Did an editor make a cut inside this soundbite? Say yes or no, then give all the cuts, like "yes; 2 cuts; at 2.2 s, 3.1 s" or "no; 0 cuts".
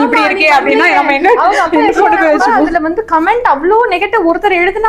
yes; 1 cut; at 2.6 s